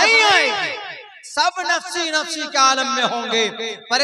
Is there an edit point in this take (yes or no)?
no